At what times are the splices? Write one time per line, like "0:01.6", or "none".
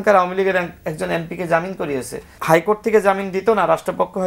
0:02.3